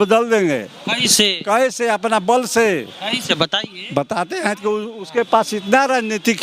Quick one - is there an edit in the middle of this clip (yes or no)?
no